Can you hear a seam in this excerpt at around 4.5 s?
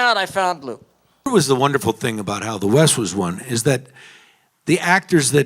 no; 1 cut; at 1.3 s

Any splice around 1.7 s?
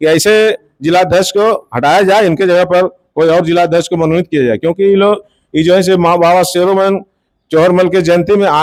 no; 0 cuts

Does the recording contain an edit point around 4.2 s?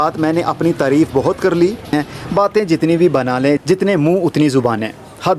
no; 1 cut; at 1.9 s

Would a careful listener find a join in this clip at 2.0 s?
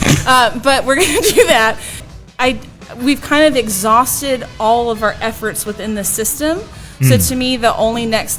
yes; 1 cut; at 2.0 s

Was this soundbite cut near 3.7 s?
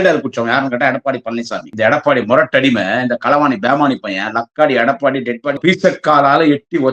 no; 2 cuts; at 1.7 s, 5.6 s

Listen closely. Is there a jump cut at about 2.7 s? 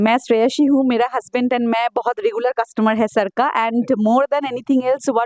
no; 0 cuts

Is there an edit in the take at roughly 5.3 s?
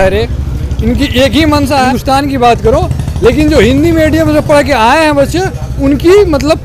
no; 1 cut; at 1.9 s

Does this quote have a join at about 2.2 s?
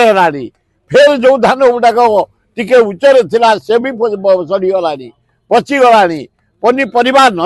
no; 0 cuts

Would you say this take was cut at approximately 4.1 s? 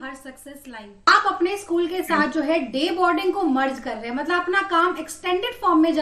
no; 1 cut; at 1.1 s

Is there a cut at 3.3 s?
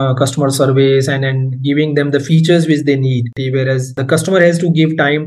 yes; 1 cut; at 3.3 s

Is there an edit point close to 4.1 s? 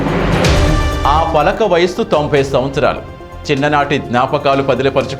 no; 1 cut; at 1.0 s

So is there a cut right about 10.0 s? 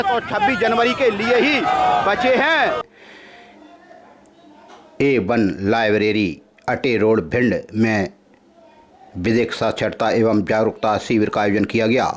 no; 1 cut; at 2.8 s

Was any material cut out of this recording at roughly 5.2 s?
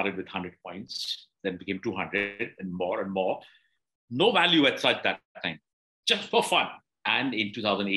no; 1 cut; at 6.8 s

